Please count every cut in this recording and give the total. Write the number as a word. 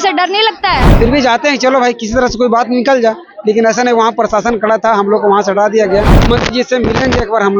two